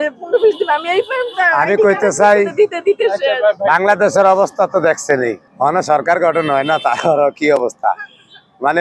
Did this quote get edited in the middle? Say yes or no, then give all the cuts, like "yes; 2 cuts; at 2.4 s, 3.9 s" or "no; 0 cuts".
no; 0 cuts